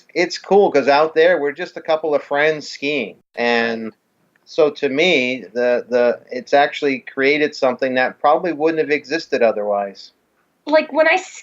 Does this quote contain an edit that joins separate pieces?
yes; 1 cut; at 3.2 s

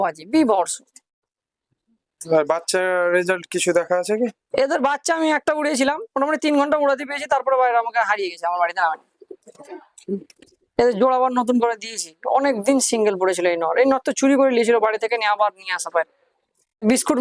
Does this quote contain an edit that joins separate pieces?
no; 0 cuts

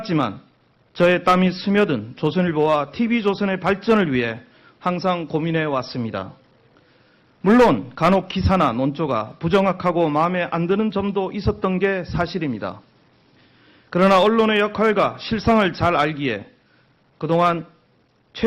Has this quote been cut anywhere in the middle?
no; 0 cuts

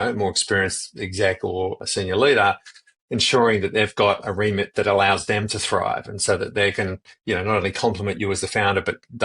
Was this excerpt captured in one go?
no; 1 cut; at 1.8 s

